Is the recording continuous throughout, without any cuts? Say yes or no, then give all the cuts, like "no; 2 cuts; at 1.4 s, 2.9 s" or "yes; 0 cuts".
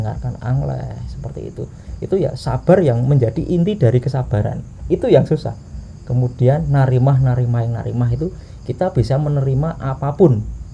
yes; 0 cuts